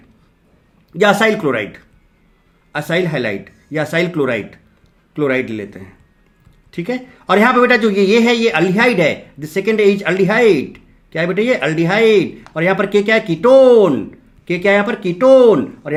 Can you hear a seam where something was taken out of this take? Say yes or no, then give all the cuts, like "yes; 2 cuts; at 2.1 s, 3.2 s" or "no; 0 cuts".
no; 0 cuts